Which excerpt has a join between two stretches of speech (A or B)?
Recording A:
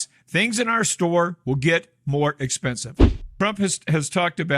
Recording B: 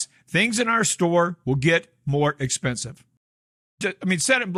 A